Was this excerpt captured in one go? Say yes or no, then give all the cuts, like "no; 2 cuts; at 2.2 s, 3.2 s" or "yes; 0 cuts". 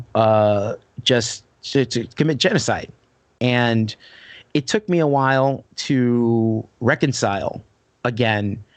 yes; 0 cuts